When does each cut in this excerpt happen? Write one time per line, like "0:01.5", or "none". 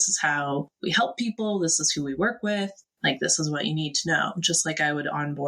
none